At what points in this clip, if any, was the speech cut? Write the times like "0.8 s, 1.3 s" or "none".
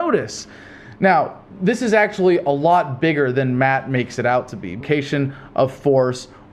none